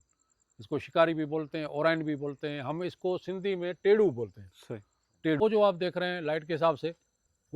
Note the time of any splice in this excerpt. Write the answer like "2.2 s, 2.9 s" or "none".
5.4 s